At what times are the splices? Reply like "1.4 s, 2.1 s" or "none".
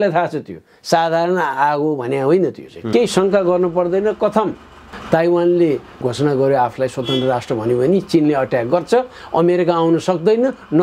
2.7 s